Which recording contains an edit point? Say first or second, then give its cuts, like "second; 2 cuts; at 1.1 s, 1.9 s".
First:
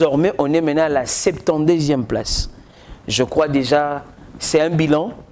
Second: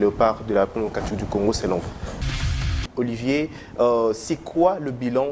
second; 1 cut; at 2.6 s